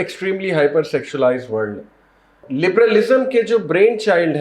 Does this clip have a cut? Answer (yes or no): yes